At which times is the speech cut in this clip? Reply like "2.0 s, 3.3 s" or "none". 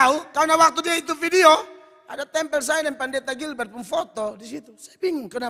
none